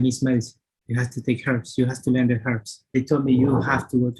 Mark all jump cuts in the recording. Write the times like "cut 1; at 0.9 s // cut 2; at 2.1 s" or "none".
cut 1; at 2.8 s